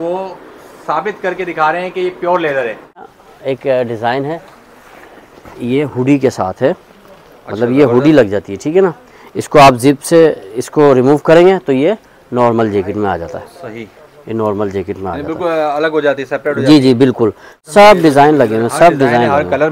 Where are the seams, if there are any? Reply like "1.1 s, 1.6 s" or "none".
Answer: 3.1 s, 17.5 s

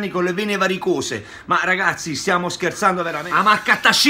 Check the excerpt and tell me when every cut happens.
3.2 s

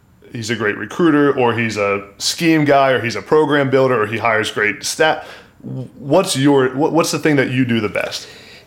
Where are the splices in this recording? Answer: none

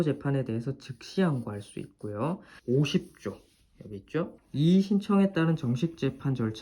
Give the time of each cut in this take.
2.5 s, 4.4 s

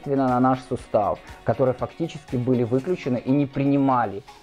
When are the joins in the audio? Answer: 1.2 s

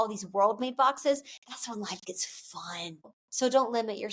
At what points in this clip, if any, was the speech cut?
3.2 s

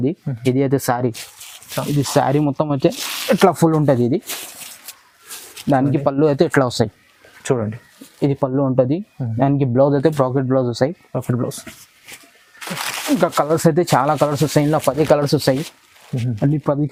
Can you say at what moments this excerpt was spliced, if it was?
none

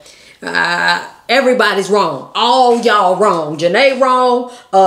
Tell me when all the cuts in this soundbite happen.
none

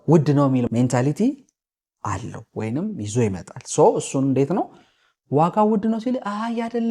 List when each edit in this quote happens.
none

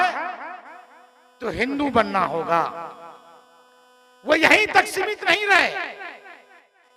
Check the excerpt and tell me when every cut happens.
none

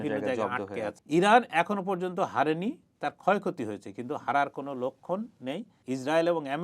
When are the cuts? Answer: 1.0 s, 5.7 s

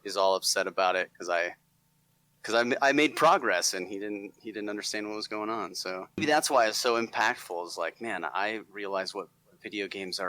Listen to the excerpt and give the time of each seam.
6.2 s

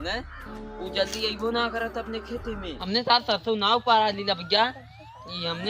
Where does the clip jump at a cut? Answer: 2.7 s

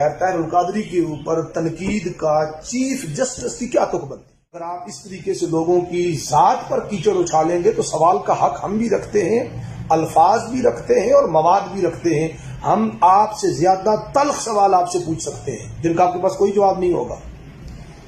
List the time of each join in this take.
4.8 s

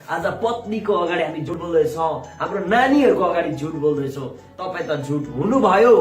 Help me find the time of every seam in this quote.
1.5 s

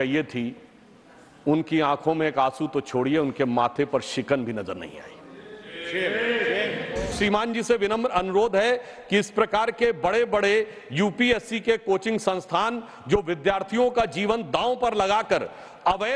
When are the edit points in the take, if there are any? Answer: 7.2 s

